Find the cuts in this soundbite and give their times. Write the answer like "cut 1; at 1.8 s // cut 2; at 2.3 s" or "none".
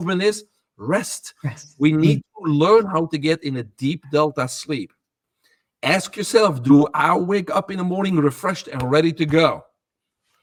none